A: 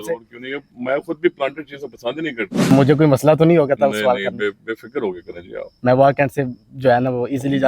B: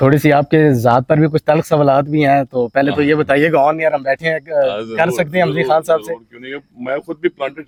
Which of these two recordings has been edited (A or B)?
A